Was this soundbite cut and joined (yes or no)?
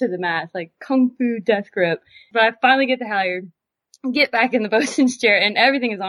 yes